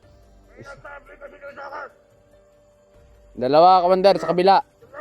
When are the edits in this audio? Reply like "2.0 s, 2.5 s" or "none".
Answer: 2.0 s, 3.3 s